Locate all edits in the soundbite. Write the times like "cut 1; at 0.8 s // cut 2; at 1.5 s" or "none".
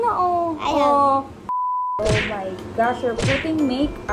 cut 1; at 1.7 s